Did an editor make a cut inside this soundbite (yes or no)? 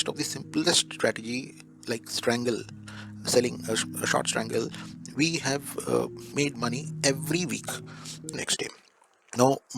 yes